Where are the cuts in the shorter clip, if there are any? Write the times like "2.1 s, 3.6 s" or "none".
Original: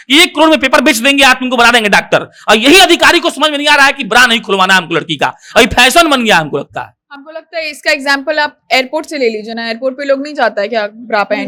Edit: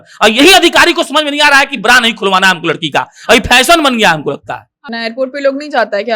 4.9 s